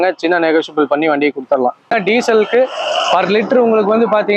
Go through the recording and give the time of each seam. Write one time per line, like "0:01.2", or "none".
0:01.9